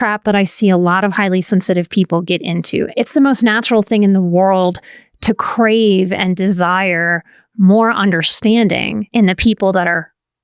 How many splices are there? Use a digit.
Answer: 2